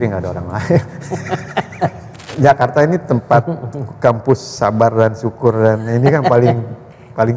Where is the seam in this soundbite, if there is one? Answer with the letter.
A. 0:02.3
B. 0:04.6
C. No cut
A